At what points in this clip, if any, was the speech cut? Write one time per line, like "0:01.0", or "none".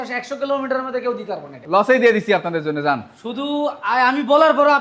0:01.5